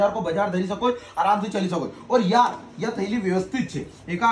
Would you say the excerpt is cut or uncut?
uncut